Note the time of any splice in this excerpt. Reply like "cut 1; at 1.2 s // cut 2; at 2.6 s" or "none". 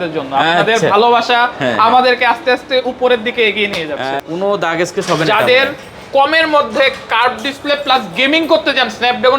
cut 1; at 4.1 s